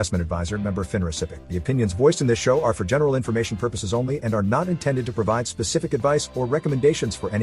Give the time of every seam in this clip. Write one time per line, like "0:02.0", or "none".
0:01.4